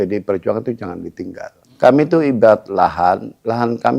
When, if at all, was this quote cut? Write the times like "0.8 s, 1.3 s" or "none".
1.8 s